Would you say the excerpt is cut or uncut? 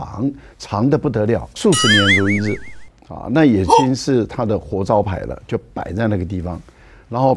cut